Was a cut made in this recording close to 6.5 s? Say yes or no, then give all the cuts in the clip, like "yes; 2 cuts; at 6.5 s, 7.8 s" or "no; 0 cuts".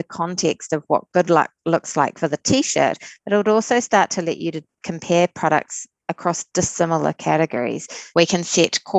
no; 1 cut; at 8.1 s